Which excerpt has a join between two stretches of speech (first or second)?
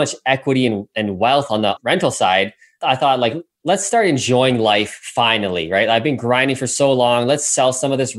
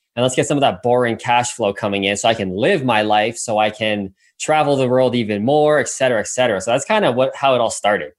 first